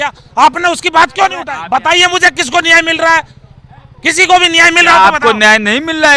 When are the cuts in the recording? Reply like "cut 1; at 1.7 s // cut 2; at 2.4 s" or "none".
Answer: cut 1; at 1.5 s